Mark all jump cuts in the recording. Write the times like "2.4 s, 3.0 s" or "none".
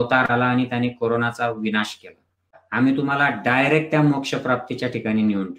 2.6 s